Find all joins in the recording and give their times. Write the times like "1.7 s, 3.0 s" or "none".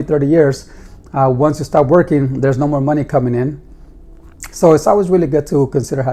none